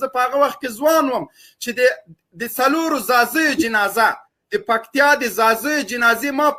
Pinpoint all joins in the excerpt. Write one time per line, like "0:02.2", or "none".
none